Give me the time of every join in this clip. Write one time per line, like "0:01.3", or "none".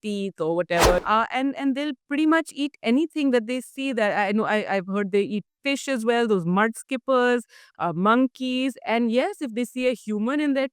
0:01.0